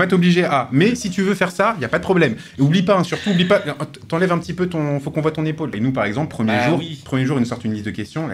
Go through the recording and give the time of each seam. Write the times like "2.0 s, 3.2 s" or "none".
5.8 s